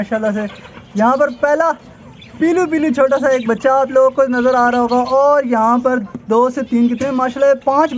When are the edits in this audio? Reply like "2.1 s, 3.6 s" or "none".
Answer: none